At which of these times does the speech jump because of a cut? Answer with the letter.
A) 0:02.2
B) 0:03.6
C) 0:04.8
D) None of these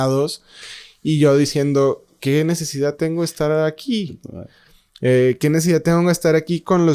D